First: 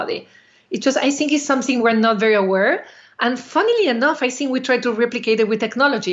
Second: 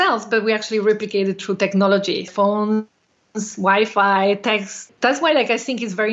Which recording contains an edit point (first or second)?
second